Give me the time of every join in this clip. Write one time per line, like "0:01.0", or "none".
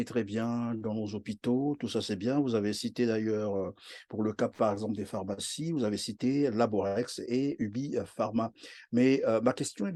none